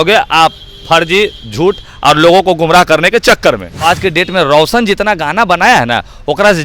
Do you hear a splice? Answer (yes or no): yes